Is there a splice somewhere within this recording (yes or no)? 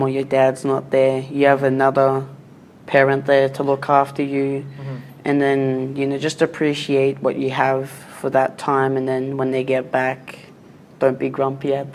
no